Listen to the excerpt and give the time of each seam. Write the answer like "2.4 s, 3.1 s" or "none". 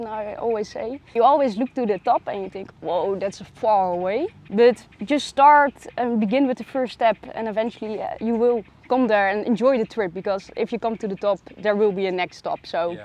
1.1 s, 4.4 s